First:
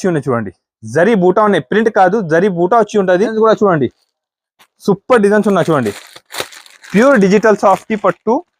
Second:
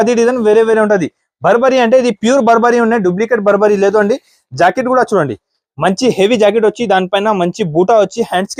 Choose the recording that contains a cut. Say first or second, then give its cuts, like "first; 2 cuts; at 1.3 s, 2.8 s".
first; 1 cut; at 3.3 s